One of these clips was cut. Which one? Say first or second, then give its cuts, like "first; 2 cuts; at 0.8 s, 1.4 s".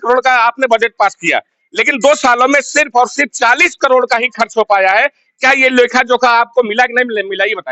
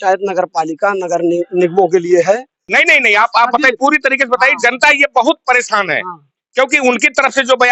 second; 1 cut; at 2.7 s